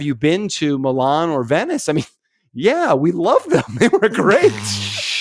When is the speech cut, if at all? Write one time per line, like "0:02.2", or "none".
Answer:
none